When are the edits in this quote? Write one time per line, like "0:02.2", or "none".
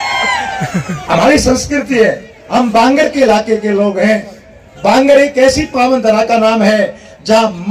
none